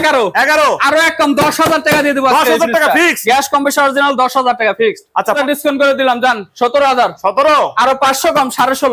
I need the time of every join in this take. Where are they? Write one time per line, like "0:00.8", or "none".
0:05.3